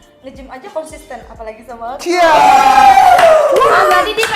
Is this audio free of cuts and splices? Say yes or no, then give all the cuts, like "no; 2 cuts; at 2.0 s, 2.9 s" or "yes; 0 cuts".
yes; 0 cuts